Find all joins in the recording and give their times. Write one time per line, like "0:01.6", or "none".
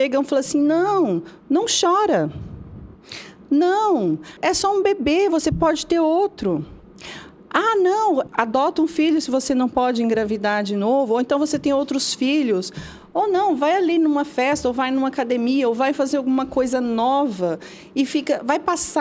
0:04.4
0:08.3

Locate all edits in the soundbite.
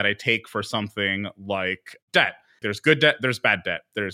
0:02.6

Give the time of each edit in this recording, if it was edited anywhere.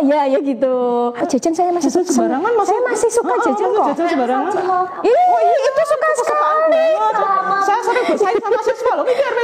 0:01.2

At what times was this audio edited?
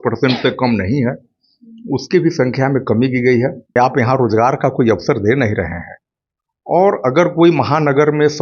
0:03.8

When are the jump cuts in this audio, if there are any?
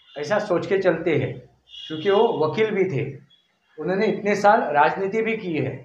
none

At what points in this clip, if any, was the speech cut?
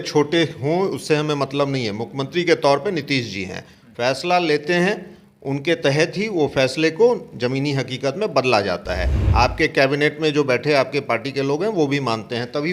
0:09.2

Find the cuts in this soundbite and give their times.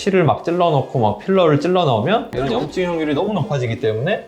0:02.3

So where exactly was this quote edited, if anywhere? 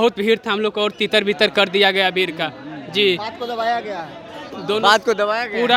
none

